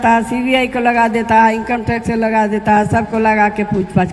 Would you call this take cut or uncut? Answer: uncut